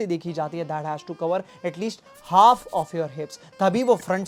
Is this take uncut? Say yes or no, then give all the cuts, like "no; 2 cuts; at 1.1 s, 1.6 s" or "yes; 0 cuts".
yes; 0 cuts